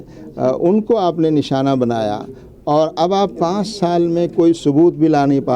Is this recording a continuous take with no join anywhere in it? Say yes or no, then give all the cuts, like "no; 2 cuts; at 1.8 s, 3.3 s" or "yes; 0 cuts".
yes; 0 cuts